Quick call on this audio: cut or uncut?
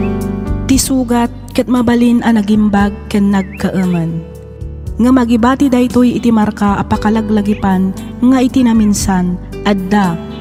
uncut